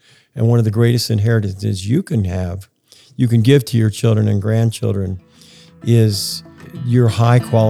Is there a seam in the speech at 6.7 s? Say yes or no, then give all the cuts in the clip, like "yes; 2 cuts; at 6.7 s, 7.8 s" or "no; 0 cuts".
yes; 1 cut; at 6.7 s